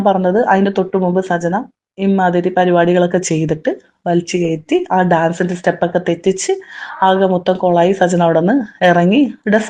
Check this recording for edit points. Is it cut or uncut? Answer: uncut